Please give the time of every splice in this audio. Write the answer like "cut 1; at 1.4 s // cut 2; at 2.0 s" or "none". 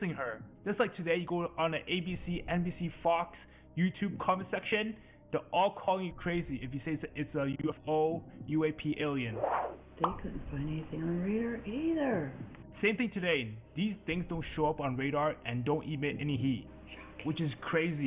none